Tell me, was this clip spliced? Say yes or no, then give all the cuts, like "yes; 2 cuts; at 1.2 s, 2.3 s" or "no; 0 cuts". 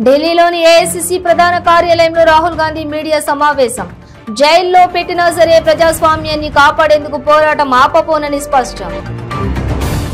no; 0 cuts